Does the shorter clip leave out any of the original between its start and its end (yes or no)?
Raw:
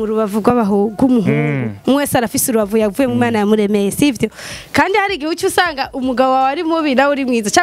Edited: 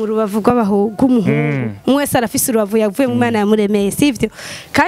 no